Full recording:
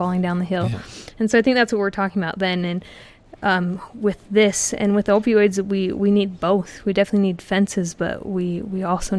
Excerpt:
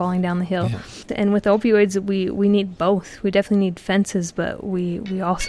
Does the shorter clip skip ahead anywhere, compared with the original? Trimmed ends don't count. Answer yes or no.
yes